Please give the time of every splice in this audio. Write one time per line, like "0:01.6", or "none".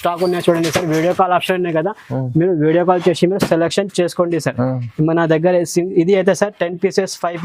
none